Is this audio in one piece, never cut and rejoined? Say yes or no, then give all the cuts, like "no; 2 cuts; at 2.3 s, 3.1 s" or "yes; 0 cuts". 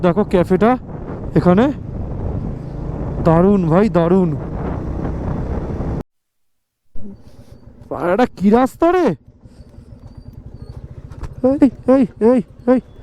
no; 1 cut; at 6.0 s